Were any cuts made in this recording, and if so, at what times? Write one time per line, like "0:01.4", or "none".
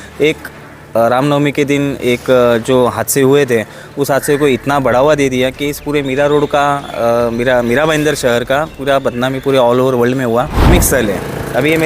0:10.7